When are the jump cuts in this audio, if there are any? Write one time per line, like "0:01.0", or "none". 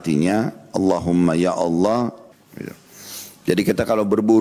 0:02.2